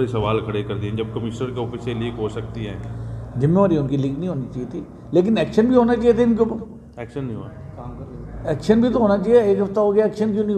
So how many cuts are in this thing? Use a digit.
0